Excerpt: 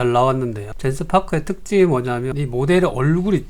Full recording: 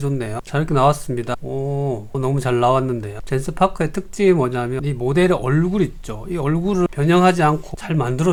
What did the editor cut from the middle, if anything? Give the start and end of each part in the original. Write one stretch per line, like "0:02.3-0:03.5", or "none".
none